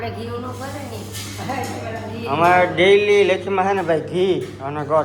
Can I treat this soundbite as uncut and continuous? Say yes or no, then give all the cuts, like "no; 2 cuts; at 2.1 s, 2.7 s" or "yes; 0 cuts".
yes; 0 cuts